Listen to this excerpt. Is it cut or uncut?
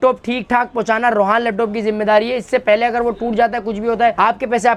uncut